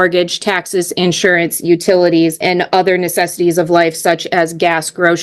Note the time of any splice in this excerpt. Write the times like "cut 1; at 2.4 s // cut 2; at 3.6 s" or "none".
cut 1; at 2.4 s